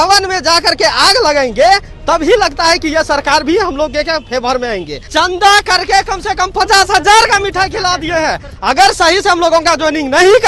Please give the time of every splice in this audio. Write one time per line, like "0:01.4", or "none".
0:05.1
0:08.5